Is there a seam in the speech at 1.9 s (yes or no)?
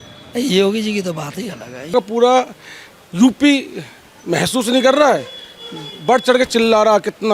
yes